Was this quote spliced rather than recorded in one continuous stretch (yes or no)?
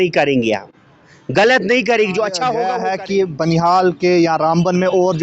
yes